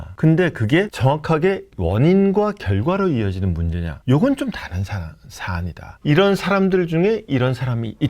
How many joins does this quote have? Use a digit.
1